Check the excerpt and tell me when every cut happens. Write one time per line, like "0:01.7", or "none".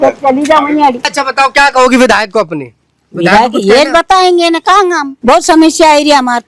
0:01.2
0:05.1